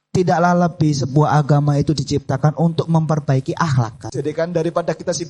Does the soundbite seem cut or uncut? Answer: cut